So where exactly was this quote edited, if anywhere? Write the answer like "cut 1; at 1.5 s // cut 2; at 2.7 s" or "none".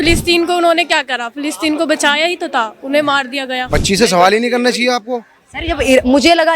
cut 1; at 3.6 s